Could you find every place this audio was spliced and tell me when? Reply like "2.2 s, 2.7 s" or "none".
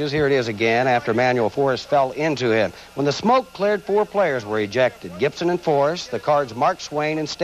4.8 s